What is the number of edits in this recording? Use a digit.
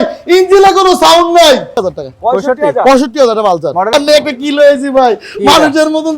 1